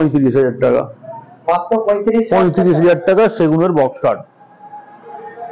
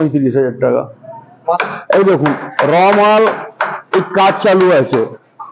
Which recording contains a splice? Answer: second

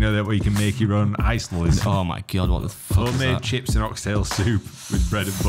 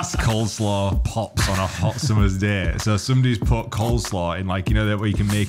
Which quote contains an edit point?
first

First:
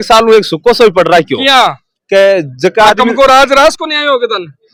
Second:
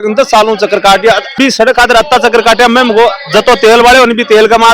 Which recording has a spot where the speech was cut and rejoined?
second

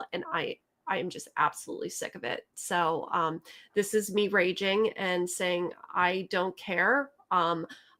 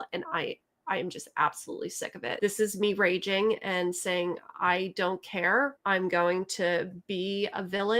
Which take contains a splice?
second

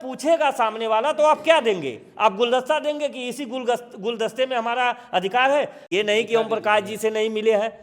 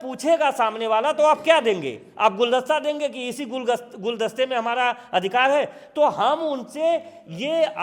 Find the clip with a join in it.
first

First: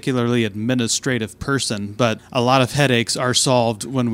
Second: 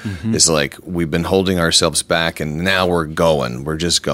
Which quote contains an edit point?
first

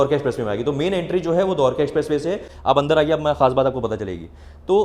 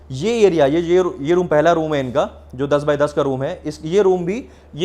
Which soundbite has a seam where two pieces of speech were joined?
first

